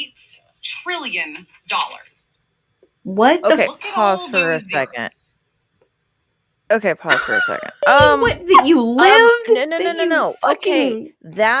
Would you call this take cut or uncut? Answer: cut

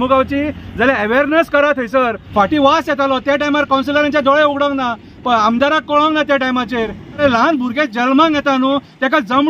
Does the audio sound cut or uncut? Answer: cut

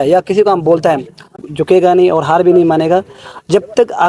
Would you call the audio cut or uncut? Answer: cut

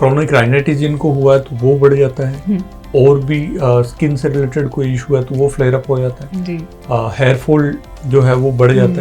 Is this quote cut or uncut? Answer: uncut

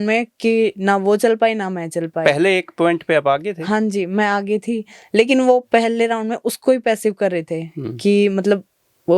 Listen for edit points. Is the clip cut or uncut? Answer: uncut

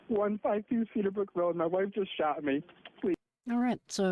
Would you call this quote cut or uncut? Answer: uncut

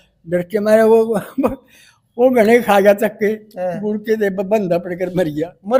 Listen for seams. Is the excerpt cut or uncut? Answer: uncut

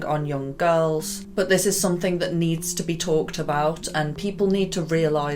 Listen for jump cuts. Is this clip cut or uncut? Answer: uncut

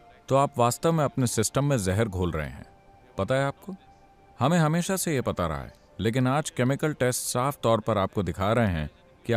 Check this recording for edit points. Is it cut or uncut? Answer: uncut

